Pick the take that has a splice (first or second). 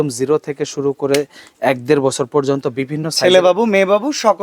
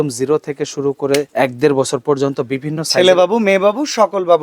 second